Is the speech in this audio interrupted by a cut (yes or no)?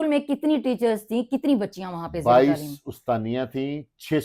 no